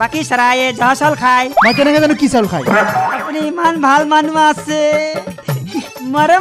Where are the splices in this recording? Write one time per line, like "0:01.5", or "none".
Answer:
0:03.2